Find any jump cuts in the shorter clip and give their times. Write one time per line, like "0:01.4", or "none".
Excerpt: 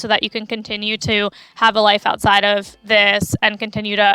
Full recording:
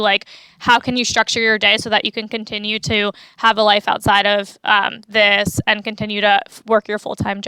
0:02.7